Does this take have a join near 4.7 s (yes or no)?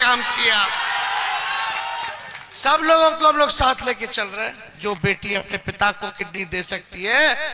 yes